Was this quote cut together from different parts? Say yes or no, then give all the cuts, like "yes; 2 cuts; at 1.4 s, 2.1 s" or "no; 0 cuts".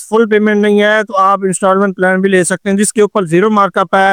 no; 0 cuts